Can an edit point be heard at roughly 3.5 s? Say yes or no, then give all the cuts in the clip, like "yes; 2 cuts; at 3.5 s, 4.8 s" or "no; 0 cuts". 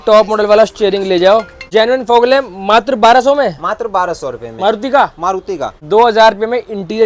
no; 2 cuts; at 1.6 s, 5.8 s